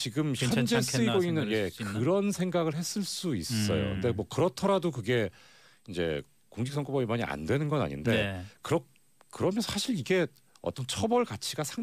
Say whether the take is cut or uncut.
uncut